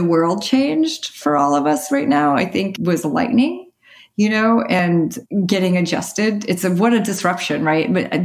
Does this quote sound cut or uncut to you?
cut